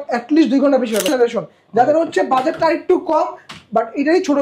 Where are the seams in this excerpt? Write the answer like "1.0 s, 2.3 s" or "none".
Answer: 1.1 s